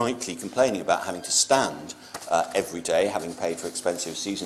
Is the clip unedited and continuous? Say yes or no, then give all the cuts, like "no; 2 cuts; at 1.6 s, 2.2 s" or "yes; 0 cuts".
yes; 0 cuts